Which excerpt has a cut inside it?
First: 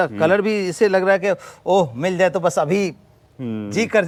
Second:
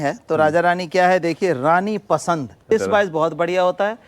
second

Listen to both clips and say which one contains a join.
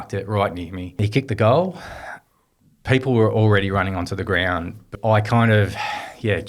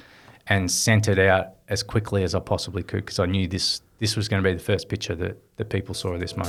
first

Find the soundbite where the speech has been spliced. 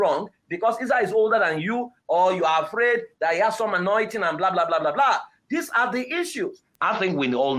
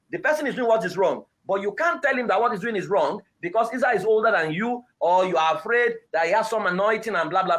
first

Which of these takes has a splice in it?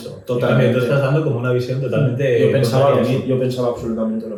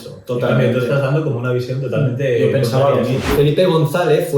second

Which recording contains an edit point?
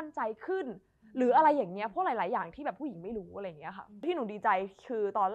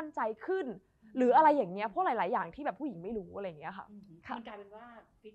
first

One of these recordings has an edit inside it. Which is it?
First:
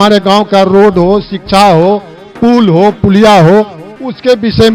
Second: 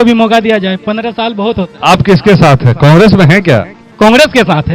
second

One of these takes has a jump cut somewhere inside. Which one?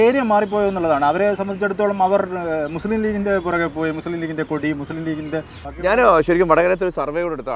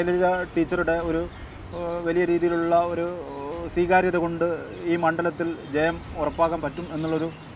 first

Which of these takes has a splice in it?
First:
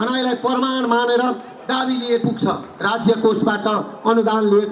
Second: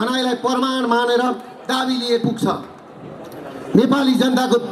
first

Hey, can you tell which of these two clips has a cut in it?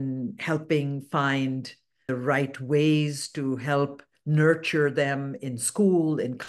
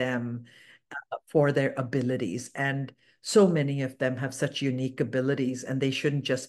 first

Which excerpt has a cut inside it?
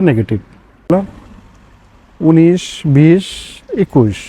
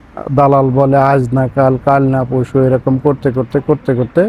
first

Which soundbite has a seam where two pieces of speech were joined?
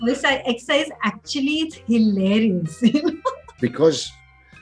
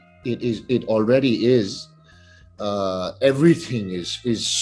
first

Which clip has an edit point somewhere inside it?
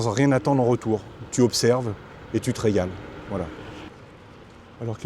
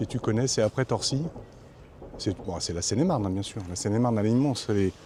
first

